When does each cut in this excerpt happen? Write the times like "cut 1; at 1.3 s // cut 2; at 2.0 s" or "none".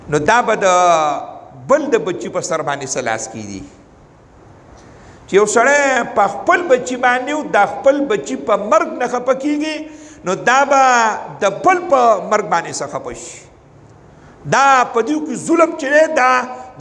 none